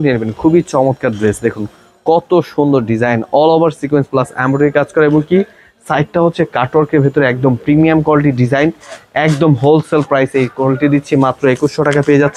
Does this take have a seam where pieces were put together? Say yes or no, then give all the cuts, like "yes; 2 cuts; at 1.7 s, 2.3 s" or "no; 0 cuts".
no; 0 cuts